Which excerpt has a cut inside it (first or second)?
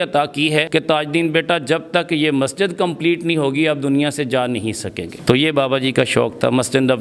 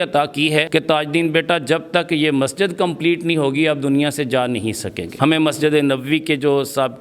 second